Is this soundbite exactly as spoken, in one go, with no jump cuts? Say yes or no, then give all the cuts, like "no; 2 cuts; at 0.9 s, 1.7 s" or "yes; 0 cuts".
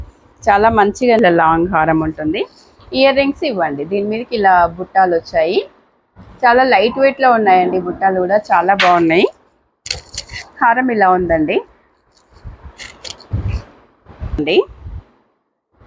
no; 2 cuts; at 1.2 s, 14.4 s